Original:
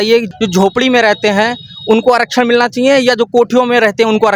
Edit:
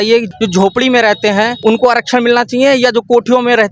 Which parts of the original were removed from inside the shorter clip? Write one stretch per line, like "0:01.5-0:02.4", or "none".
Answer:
0:01.5-0:01.8